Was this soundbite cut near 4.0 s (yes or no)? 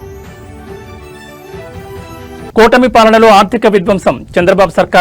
no